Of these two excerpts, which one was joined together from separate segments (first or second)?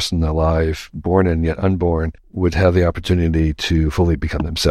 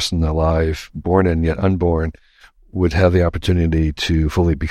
first